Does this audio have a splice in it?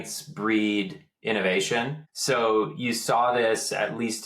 yes; 1 cut; at 2.1 s

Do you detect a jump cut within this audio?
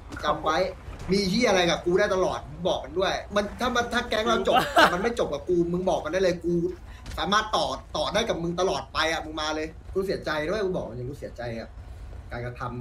yes; 2 cuts; at 3.3 s, 9.8 s

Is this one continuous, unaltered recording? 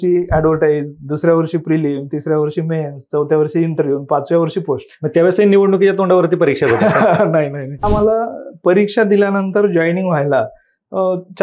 no; 1 cut; at 7.9 s

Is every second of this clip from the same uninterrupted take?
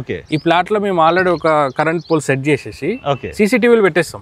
yes; 0 cuts

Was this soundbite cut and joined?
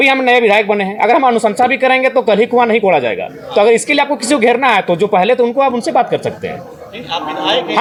no; 0 cuts

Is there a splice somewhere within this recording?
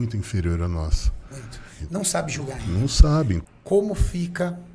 yes; 1 cut; at 3.4 s

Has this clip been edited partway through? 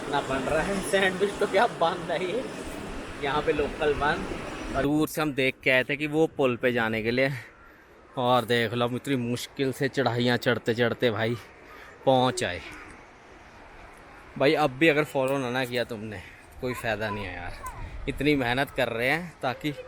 yes; 1 cut; at 4.8 s

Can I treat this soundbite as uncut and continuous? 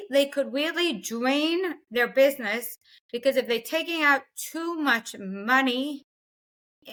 yes; 0 cuts

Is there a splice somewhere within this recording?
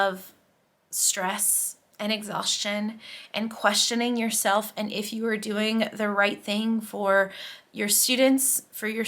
no; 0 cuts

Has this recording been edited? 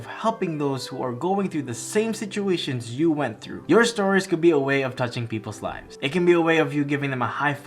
yes; 1 cut; at 3.5 s

